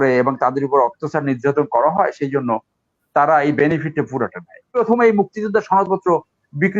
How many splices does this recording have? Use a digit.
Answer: 1